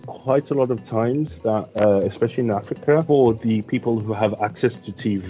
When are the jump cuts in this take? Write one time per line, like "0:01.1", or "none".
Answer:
0:03.0